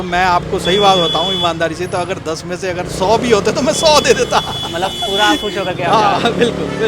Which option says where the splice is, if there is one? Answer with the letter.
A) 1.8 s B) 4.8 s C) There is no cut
C